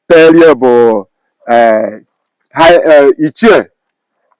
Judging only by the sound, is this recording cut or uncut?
uncut